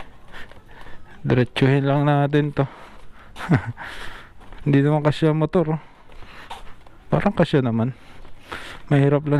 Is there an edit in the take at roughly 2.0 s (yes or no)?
no